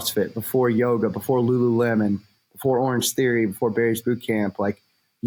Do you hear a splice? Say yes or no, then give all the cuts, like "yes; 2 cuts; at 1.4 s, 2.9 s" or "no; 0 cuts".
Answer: no; 0 cuts